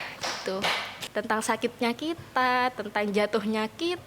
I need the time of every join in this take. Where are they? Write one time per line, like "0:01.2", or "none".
0:01.0